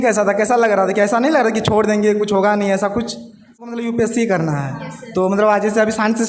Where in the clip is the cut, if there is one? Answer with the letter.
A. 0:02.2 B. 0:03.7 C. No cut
B